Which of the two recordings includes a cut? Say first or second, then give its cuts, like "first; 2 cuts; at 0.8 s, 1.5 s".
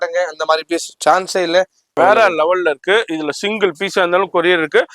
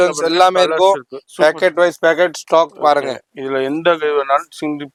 first; 1 cut; at 1.8 s